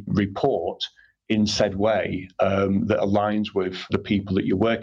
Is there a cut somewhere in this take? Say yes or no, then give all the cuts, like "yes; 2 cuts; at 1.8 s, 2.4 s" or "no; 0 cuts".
no; 0 cuts